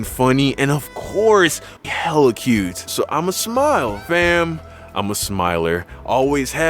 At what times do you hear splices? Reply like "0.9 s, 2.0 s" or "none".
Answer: 1.8 s

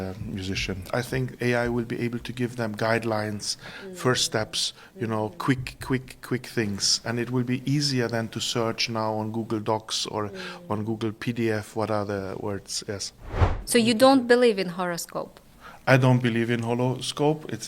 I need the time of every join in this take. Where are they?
0.8 s, 13.6 s

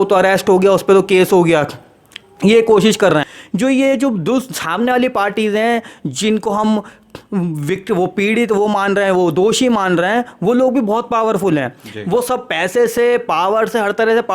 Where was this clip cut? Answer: 3.4 s

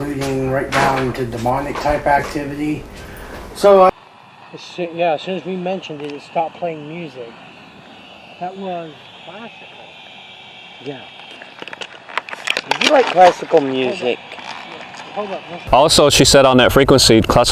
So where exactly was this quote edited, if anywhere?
3.9 s, 15.6 s

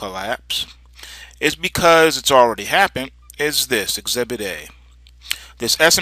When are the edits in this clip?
1.3 s

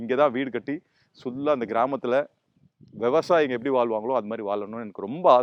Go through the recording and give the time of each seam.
none

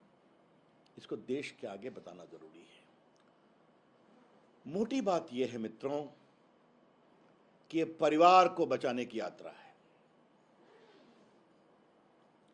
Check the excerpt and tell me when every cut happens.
none

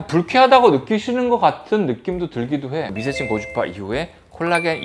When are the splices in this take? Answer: 3.0 s

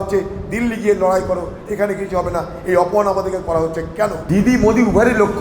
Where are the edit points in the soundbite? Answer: 1.6 s, 4.2 s

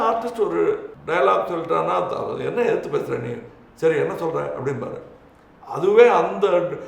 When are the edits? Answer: 0.9 s

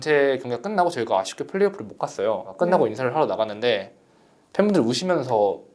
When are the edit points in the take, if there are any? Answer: 2.5 s

